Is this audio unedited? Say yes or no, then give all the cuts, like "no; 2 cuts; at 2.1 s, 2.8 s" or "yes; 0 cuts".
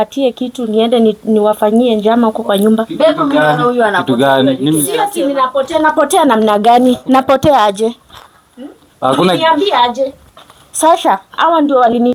yes; 0 cuts